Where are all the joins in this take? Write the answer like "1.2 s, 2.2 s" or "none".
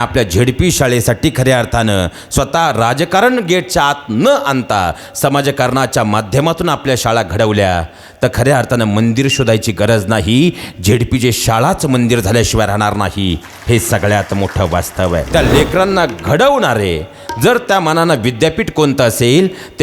15.3 s